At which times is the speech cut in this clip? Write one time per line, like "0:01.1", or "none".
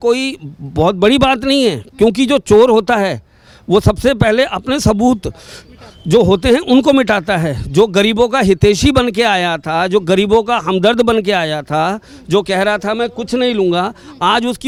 none